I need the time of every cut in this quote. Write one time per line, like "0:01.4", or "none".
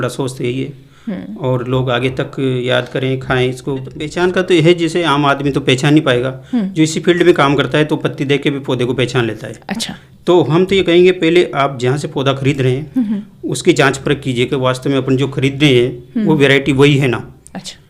0:04.0